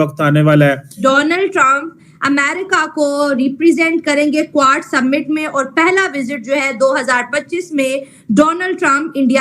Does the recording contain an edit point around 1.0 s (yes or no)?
yes